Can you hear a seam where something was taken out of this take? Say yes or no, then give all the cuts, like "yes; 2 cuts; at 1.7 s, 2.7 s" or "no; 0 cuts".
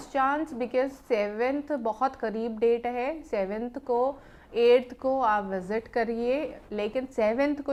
no; 0 cuts